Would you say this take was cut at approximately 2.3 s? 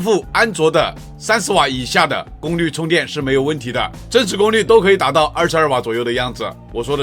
no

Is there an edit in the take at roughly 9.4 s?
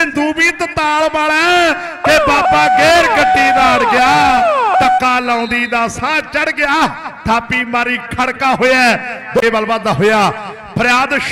yes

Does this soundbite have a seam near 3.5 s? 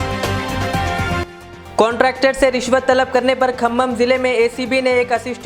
no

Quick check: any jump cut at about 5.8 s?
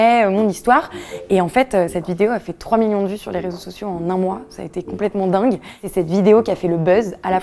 yes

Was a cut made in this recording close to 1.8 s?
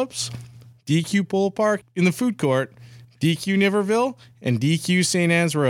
yes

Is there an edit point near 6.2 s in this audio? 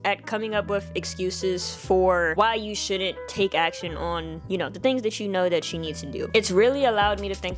yes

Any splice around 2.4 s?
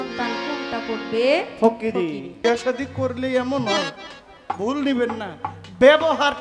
yes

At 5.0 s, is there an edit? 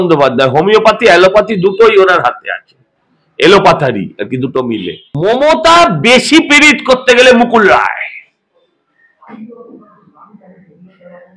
yes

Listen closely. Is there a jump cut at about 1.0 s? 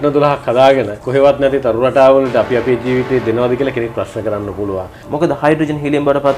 yes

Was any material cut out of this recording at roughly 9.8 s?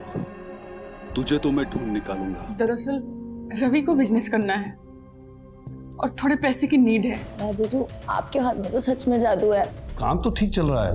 yes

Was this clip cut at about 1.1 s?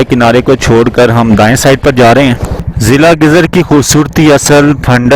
no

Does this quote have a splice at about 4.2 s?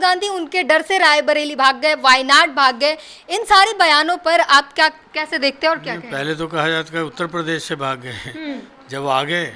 no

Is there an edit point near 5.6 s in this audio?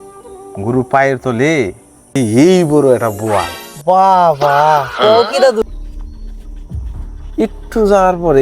yes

